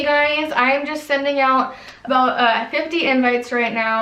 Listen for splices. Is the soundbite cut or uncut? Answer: uncut